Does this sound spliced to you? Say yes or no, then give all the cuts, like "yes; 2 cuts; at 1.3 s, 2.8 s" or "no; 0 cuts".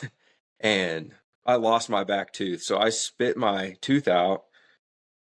no; 0 cuts